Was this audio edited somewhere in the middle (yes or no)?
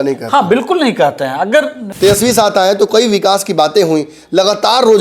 yes